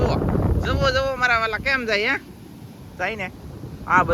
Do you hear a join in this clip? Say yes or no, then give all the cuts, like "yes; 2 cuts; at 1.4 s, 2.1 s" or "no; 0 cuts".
no; 0 cuts